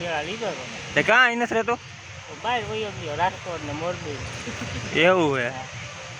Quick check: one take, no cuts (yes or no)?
yes